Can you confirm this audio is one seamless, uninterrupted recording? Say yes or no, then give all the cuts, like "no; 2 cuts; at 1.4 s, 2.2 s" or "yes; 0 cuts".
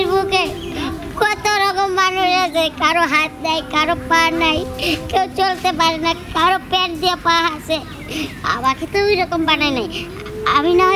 yes; 0 cuts